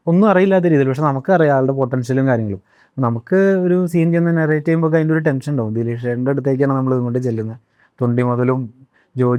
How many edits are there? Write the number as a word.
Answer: zero